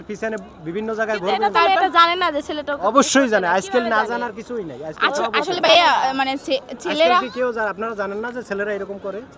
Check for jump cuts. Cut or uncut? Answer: uncut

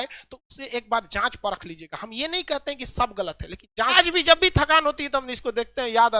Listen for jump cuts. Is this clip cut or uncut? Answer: cut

